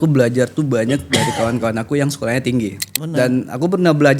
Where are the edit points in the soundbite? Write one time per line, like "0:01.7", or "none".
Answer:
0:02.9